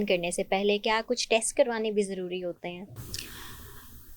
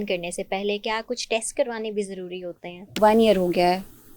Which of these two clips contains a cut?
second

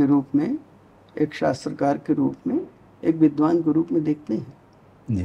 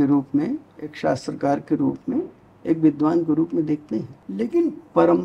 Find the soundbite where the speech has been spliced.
second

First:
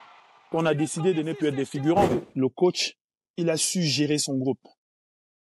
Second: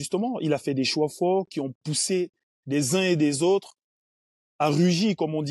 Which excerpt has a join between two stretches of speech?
first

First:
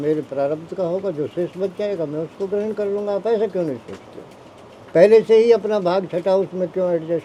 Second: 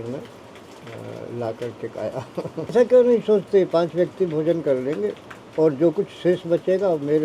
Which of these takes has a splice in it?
second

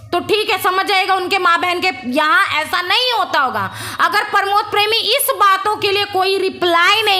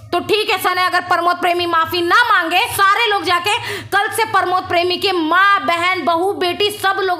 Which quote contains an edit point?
second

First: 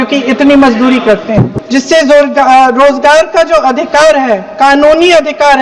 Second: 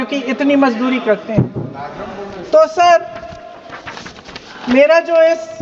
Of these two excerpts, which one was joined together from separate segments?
first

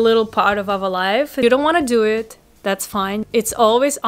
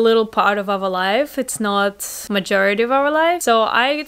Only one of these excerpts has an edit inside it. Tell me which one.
first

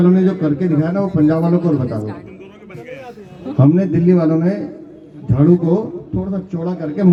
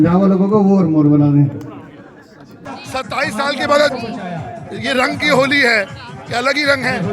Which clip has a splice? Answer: second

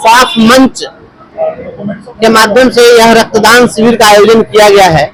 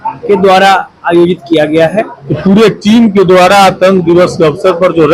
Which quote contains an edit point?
second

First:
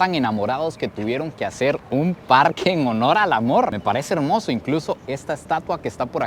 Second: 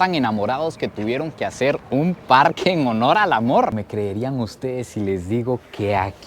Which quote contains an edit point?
second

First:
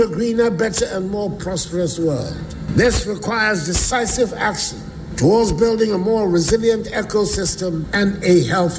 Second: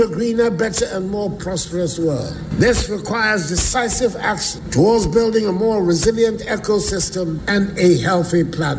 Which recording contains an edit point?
second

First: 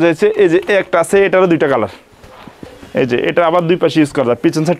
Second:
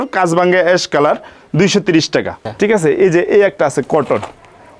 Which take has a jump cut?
second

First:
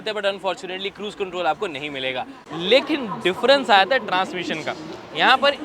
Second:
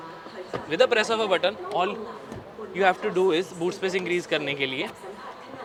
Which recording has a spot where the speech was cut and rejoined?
first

